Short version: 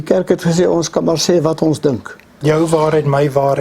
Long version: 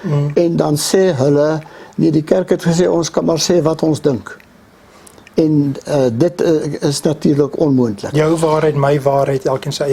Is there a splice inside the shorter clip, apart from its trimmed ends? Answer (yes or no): yes